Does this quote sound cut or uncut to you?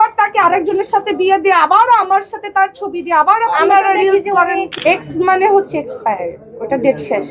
cut